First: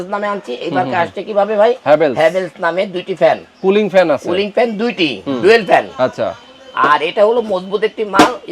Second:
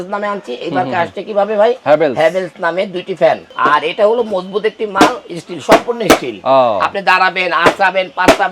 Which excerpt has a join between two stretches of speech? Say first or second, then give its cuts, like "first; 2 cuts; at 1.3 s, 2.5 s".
second; 1 cut; at 3.5 s